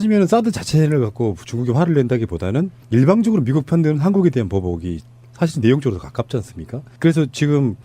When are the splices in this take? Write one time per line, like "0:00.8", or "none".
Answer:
0:02.8

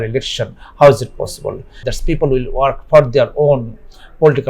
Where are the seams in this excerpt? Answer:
0:01.8

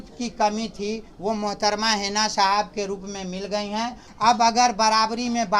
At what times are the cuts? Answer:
0:04.1

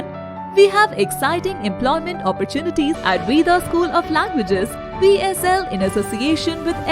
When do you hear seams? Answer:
0:03.0

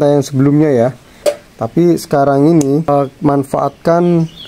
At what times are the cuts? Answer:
0:01.1
0:02.9

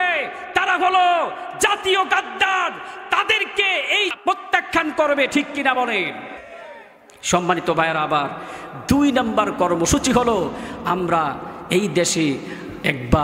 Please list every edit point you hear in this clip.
0:04.1

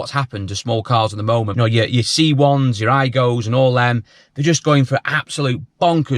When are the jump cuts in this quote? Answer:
0:01.5

